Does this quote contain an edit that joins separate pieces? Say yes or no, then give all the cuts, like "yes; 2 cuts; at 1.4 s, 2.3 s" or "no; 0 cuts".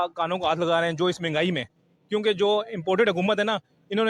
no; 0 cuts